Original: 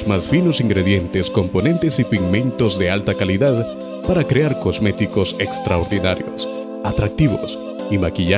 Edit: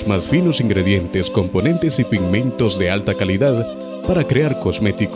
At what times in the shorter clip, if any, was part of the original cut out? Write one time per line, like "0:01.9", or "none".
none